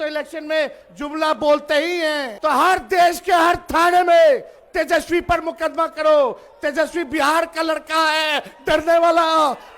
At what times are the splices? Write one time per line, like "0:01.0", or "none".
0:02.3